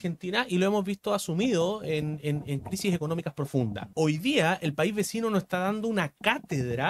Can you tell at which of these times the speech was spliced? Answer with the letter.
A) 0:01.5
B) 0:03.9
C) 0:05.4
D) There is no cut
B